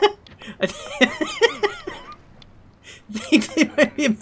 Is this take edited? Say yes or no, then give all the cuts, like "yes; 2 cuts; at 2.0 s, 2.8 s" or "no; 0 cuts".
no; 0 cuts